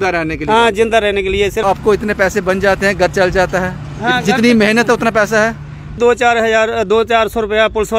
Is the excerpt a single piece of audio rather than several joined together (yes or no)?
no